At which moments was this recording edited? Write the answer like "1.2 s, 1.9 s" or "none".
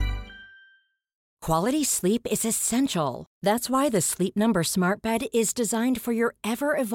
1.3 s